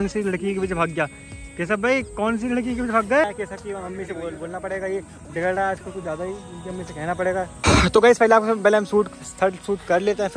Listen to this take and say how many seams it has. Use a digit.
2